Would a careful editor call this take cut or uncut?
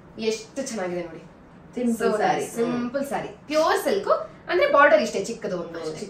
uncut